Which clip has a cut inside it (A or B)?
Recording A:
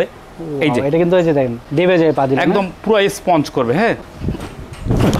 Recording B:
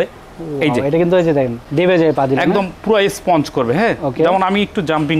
A